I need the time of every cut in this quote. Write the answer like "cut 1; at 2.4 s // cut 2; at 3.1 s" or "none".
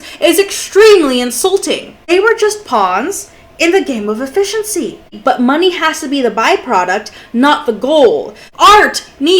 cut 1; at 2.1 s // cut 2; at 5.1 s // cut 3; at 8.4 s